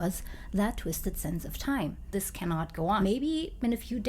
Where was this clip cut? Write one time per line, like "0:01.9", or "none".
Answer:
0:02.3